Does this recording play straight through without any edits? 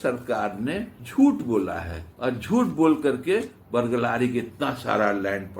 yes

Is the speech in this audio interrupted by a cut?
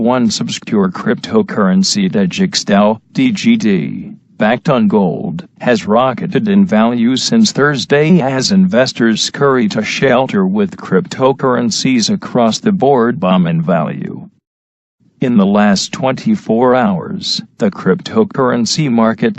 yes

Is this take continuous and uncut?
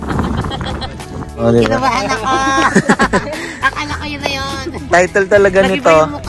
no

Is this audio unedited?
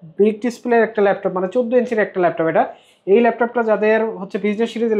yes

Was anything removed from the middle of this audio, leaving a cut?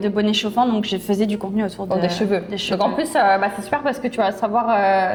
no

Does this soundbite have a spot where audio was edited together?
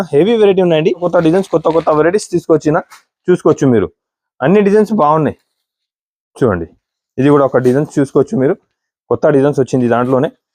yes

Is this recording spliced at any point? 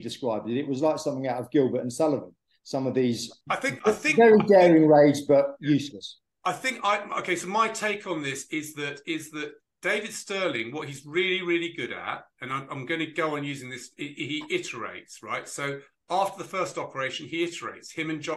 no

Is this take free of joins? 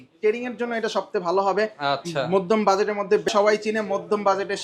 no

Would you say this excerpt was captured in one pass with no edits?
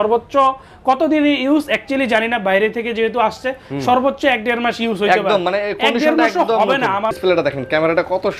no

